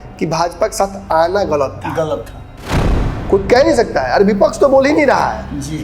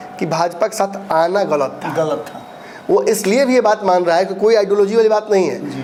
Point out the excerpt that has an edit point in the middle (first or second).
first